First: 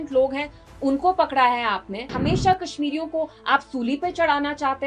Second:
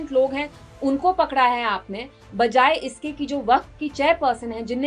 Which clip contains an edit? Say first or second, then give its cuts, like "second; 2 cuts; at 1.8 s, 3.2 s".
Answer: first; 1 cut; at 2.1 s